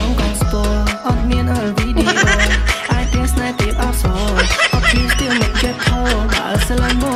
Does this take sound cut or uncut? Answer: uncut